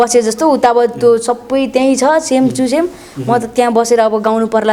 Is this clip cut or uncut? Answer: uncut